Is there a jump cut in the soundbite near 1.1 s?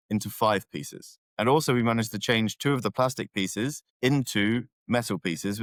no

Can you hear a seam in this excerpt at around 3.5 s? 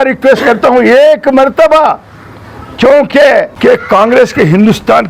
yes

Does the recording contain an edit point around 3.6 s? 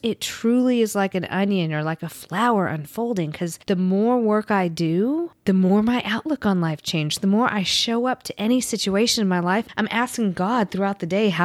yes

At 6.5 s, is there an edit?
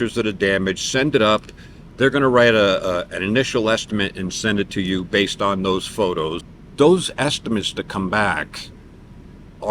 yes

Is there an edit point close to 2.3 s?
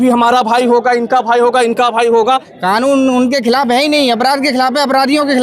yes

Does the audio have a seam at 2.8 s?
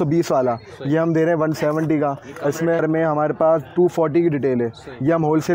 yes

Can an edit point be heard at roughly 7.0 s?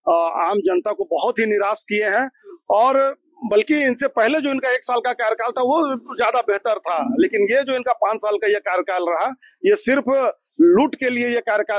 no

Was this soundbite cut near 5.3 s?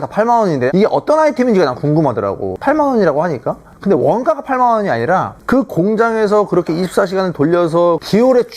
yes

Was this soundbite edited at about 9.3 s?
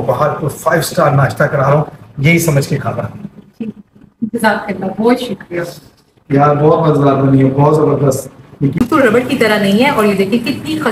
yes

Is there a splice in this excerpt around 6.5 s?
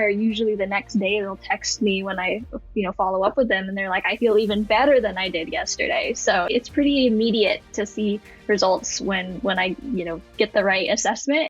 yes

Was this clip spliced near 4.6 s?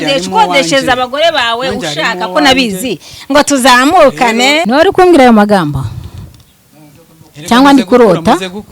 yes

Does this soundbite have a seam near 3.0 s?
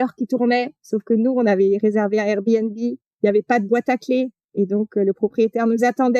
yes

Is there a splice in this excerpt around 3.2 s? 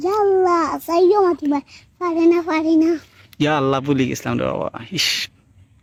no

